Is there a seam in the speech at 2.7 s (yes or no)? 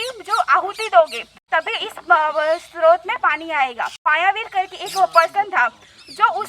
no